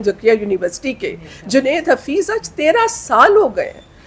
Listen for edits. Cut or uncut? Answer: uncut